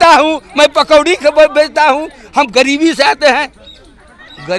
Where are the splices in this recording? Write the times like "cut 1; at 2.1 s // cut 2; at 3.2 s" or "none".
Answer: none